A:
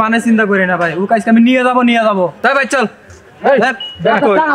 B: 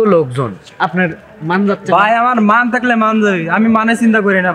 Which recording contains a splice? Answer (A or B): A